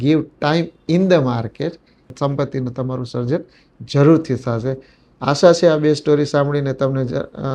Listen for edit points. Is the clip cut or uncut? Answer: uncut